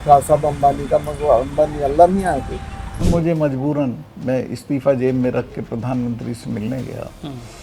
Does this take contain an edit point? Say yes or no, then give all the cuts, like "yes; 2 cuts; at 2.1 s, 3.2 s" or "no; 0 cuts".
yes; 1 cut; at 3.1 s